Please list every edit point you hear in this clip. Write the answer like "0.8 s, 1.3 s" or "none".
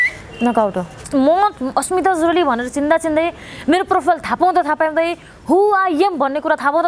1.0 s